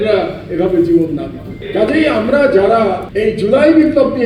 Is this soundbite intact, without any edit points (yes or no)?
yes